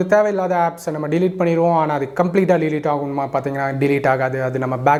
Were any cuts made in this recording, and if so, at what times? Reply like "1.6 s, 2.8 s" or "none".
none